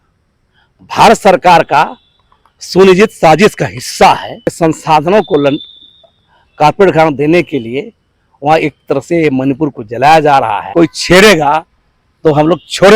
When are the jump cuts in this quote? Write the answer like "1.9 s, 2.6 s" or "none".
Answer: 4.6 s, 10.6 s